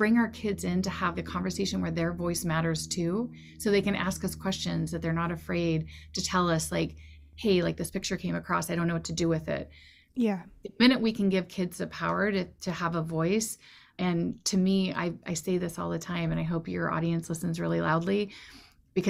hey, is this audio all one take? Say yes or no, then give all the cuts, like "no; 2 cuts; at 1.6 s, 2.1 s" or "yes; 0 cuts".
yes; 0 cuts